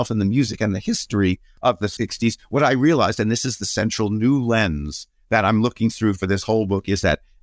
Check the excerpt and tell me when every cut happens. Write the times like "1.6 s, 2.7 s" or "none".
1.8 s